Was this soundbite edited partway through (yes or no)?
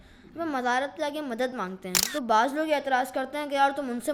no